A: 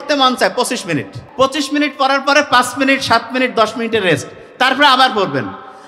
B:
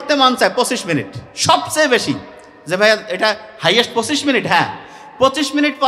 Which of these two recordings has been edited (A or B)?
A